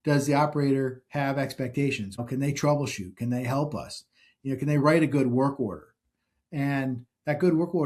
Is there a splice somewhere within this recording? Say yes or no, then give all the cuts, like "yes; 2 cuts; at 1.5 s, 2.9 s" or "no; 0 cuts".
no; 0 cuts